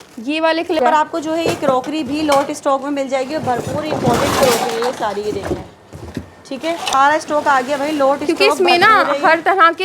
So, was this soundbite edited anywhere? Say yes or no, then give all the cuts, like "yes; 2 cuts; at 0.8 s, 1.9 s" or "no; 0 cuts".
yes; 2 cuts; at 0.8 s, 6.9 s